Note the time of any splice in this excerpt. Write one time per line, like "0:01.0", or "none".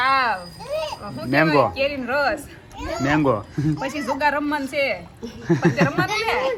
none